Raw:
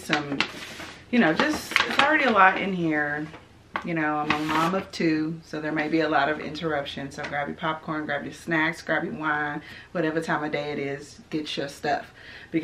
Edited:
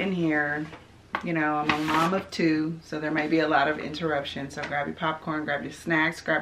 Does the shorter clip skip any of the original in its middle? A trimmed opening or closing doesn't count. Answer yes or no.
no